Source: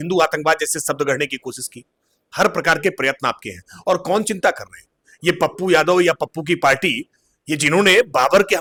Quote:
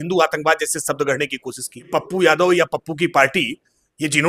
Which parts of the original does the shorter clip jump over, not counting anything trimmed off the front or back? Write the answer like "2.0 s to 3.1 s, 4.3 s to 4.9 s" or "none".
1.9 s to 5.4 s